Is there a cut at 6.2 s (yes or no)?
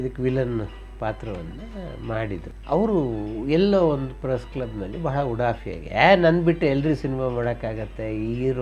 no